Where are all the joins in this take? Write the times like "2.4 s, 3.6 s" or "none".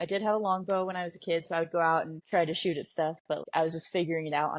2.2 s, 3.4 s

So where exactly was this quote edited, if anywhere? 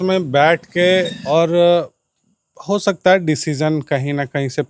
1.2 s

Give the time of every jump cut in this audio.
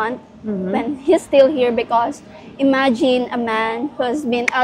none

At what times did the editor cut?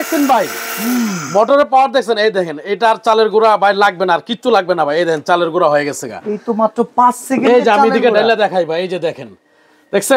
none

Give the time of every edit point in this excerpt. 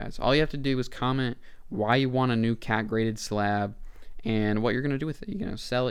none

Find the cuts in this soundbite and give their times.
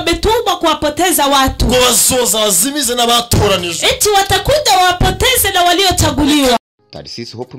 6.6 s

